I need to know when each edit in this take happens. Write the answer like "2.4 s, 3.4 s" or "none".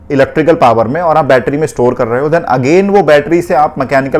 none